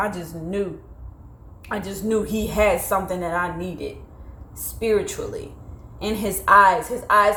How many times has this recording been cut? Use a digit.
0